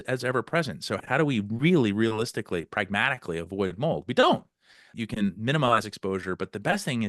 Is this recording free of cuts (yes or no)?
no